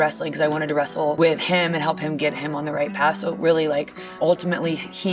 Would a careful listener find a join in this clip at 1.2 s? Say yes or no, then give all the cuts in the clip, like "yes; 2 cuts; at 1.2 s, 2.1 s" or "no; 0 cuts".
yes; 2 cuts; at 1.2 s, 4.2 s